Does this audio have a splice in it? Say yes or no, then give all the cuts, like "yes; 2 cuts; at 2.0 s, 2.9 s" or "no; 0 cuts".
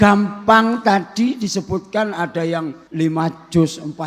yes; 1 cut; at 2.8 s